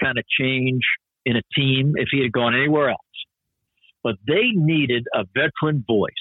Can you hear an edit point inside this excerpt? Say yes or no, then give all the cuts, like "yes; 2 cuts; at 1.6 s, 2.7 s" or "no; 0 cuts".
no; 0 cuts